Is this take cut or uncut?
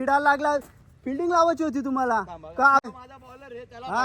cut